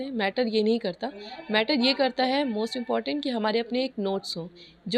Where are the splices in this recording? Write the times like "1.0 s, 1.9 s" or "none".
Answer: none